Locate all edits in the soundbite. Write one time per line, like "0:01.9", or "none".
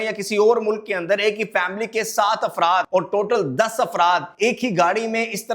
0:02.9
0:04.3